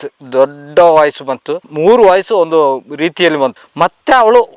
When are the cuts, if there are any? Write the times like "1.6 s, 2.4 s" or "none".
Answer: 3.6 s

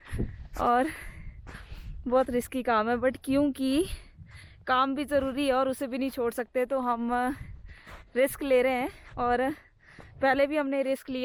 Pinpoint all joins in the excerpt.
none

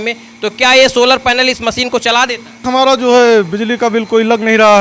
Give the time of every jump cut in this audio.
2.6 s

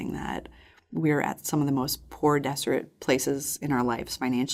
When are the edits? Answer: none

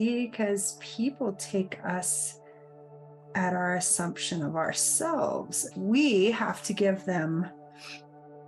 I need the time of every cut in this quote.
5.6 s

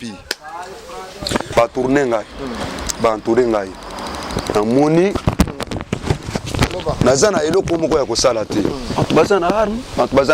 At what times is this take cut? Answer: 1.5 s

